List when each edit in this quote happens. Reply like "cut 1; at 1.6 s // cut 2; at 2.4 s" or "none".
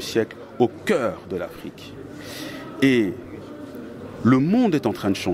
none

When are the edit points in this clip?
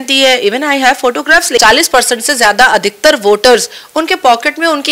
cut 1; at 1.6 s

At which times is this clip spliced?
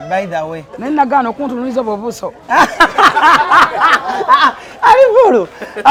none

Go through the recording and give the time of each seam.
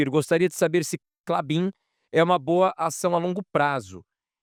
none

